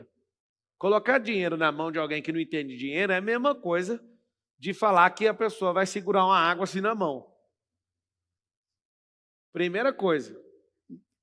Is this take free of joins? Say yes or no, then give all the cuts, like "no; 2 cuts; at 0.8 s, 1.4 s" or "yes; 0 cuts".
yes; 0 cuts